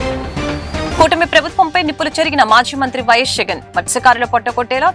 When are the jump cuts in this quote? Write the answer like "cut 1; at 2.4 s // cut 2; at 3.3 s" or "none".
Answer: none